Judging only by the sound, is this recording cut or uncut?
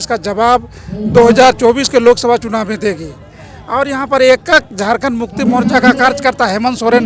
uncut